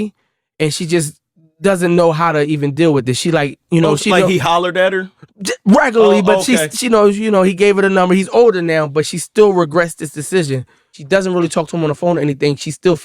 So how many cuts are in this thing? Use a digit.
1